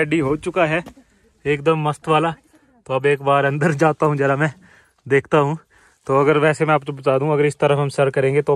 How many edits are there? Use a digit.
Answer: 0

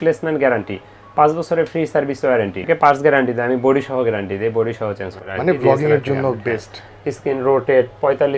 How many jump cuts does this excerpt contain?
2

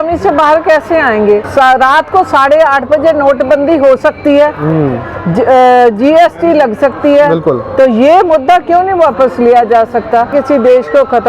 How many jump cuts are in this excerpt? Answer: 2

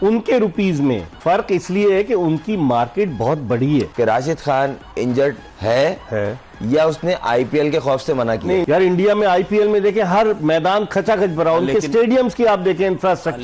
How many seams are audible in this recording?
3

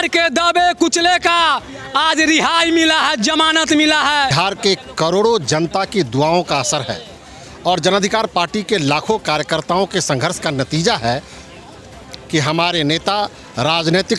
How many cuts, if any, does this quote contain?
1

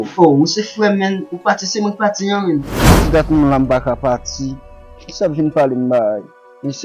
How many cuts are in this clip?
1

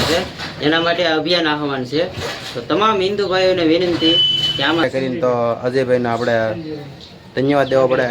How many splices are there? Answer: 1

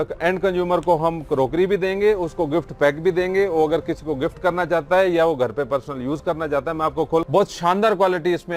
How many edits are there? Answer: 1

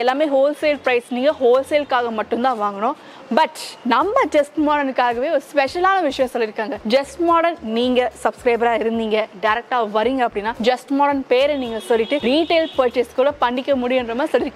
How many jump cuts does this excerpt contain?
4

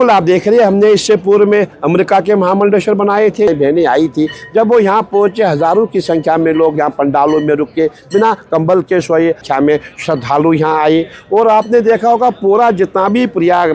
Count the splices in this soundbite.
2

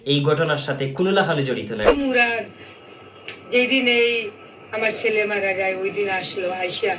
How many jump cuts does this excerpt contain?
1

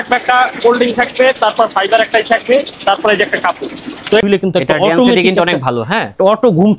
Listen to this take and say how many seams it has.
1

